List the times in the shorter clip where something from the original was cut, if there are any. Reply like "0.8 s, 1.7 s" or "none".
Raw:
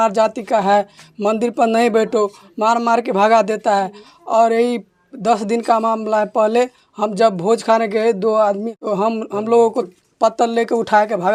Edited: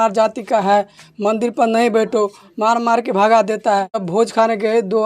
4.1 s

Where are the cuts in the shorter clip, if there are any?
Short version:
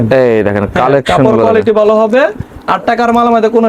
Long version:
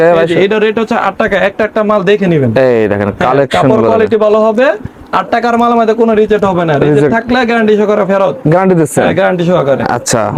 none

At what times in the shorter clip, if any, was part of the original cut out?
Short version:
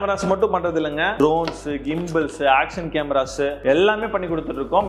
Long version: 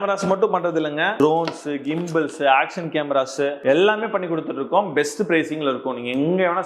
none

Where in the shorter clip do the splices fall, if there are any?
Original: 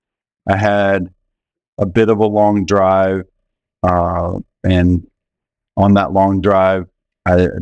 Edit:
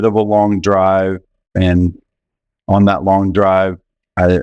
1.4 s

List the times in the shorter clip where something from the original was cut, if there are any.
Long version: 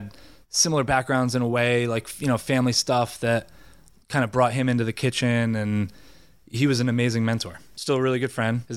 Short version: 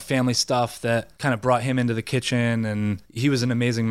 1.1 s, 3.1 s

